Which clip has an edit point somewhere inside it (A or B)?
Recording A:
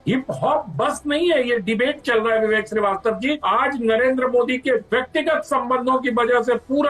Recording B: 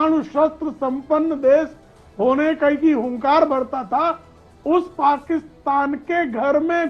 A